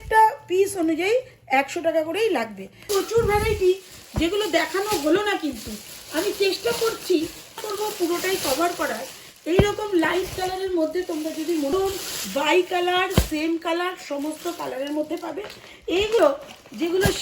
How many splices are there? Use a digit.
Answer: 4